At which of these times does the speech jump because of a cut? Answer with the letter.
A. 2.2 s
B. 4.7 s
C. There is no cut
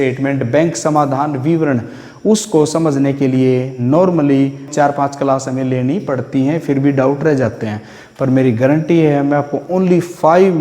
B